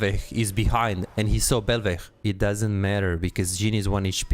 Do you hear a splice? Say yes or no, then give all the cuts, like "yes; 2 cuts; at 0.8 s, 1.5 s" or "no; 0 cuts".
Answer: yes; 1 cut; at 2.1 s